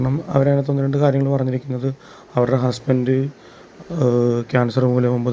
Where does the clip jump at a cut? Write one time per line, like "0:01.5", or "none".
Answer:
none